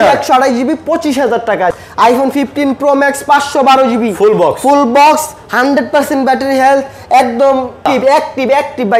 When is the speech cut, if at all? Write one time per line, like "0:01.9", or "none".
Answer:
0:01.7
0:07.9

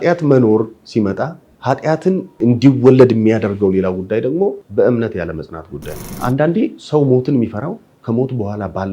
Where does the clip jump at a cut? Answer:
0:01.5
0:02.3
0:04.6
0:06.2

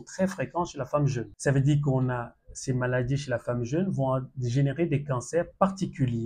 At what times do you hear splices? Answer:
0:01.3

